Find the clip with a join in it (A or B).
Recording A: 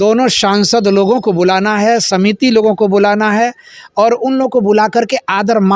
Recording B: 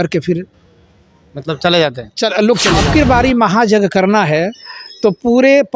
B